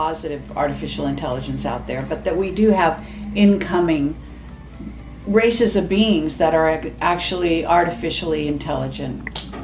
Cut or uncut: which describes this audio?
uncut